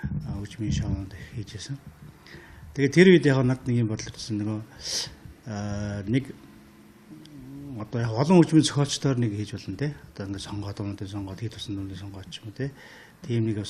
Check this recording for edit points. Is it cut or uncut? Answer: uncut